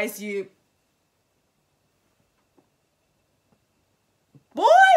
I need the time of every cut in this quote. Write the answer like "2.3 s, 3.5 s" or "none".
none